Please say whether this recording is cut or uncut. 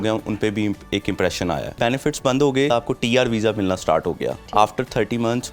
cut